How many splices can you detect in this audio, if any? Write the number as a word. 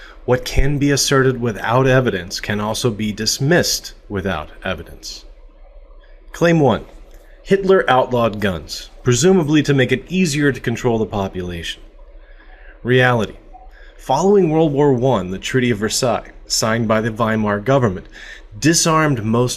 one